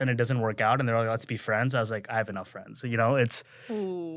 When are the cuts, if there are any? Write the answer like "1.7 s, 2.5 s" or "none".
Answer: none